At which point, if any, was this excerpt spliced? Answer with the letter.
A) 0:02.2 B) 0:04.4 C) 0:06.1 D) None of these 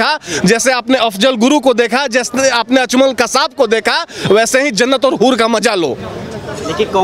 D